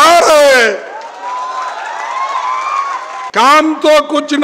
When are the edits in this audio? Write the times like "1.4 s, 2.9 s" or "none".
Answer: 3.3 s